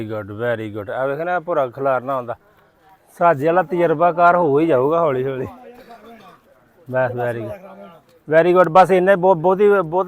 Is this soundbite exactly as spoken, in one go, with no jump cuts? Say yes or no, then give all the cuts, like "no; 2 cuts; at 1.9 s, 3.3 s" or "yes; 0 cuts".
yes; 0 cuts